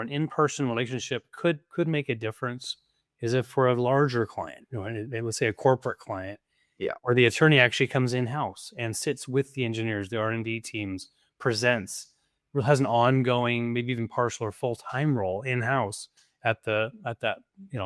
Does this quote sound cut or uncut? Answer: uncut